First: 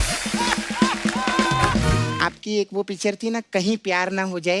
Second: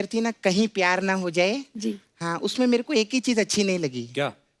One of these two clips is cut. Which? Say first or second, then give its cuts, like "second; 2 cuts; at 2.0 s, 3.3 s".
first; 1 cut; at 2.2 s